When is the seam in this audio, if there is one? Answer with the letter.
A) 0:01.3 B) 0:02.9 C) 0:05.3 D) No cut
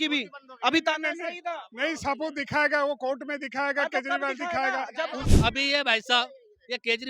C